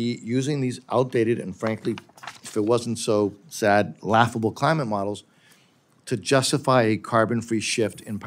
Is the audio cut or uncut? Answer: uncut